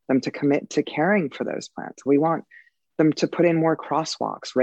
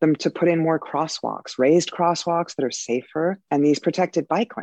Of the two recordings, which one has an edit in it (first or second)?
second